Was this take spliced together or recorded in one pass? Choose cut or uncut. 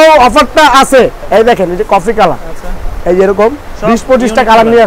cut